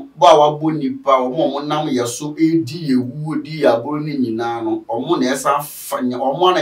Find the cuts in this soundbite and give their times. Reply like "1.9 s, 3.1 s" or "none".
none

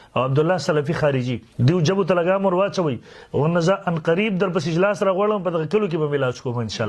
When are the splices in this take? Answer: 1.4 s

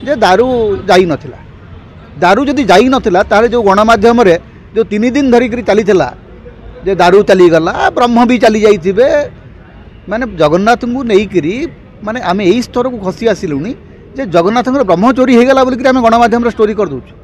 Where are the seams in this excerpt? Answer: none

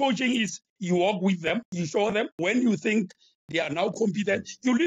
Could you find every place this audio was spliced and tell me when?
2.1 s, 3.4 s

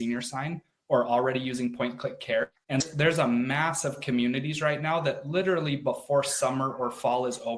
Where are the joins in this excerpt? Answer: 2.6 s

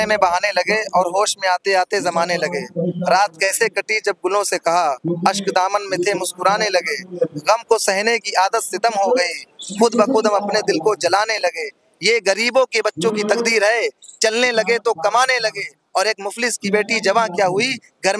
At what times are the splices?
none

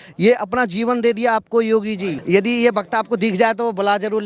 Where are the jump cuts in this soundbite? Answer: 2.1 s

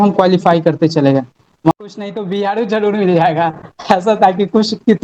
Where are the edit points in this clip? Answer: 1.7 s

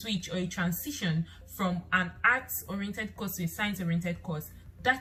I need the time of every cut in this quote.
none

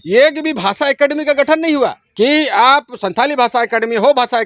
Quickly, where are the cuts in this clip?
2.0 s

